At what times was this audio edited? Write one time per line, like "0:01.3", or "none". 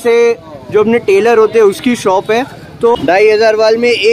0:03.0